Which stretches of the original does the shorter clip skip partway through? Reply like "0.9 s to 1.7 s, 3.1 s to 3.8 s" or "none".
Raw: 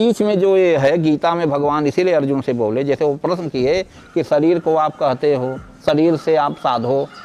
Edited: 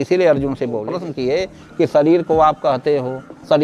2.8 s to 3.3 s